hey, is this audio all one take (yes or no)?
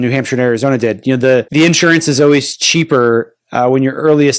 no